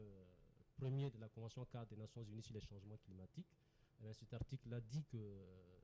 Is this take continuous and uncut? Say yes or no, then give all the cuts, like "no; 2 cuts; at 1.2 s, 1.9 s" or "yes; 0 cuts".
yes; 0 cuts